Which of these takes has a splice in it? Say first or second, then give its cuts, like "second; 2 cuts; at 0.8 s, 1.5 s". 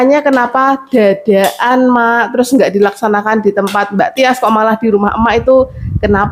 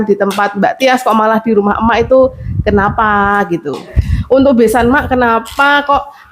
second; 1 cut; at 3.9 s